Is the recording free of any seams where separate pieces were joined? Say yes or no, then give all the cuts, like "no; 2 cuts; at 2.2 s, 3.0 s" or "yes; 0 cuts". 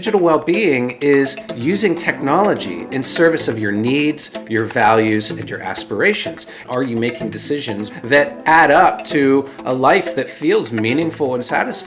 no; 2 cuts; at 6.6 s, 7.8 s